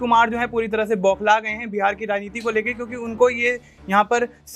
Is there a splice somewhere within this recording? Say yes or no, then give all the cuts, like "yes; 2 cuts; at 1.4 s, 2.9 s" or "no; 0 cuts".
no; 0 cuts